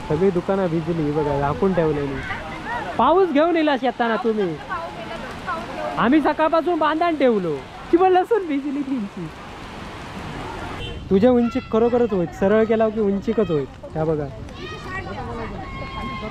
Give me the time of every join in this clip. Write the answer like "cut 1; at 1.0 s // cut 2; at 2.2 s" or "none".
cut 1; at 10.8 s